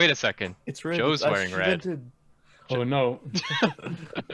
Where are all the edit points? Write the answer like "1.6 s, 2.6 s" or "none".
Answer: none